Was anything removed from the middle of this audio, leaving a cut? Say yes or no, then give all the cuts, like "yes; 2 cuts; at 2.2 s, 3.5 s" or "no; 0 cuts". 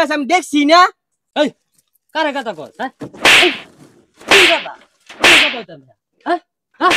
no; 0 cuts